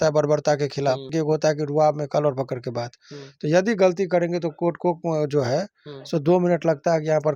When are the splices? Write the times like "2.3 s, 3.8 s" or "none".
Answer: 1.1 s